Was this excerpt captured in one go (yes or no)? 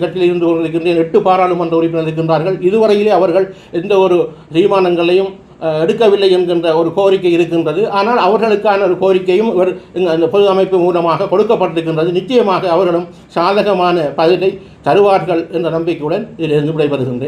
yes